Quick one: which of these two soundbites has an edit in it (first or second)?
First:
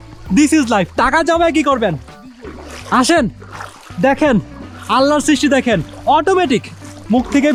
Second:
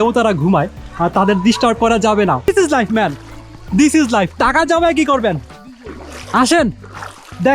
second